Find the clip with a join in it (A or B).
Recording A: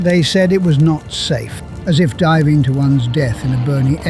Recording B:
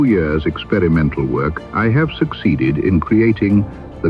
B